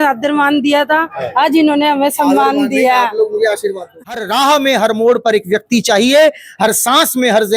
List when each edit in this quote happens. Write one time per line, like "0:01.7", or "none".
0:04.1